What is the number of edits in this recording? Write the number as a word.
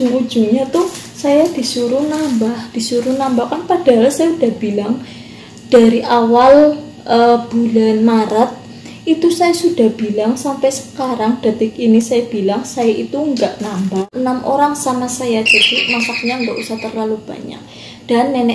one